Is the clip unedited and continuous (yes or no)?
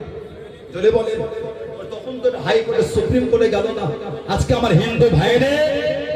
yes